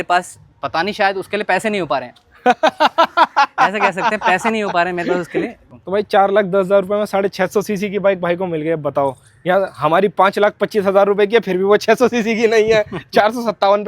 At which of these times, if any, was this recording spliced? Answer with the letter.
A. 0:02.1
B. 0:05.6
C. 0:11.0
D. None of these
B